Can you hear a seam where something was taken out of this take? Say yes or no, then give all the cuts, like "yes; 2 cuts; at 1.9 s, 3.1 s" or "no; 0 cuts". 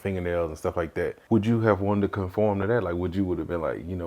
yes; 1 cut; at 1.2 s